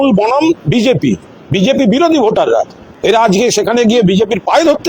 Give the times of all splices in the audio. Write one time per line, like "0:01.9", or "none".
0:02.8